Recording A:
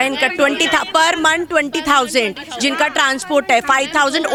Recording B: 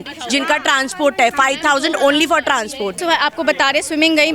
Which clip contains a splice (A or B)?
B